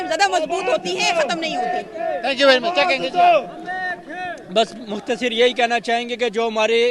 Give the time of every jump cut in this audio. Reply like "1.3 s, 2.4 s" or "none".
none